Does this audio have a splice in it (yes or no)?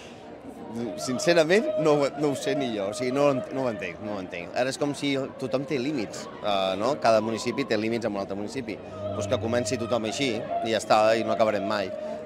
no